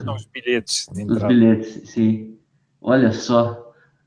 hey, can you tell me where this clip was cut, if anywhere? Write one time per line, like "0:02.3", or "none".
0:02.3